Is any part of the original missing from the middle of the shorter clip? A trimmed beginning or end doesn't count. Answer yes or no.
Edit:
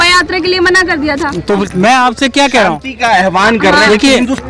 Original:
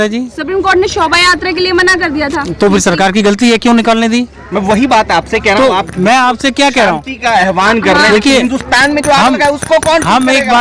yes